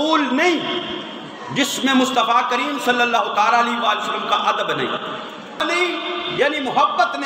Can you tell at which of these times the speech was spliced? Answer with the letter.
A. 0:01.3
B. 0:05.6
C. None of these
B